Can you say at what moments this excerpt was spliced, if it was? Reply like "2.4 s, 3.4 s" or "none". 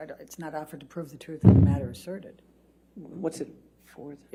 none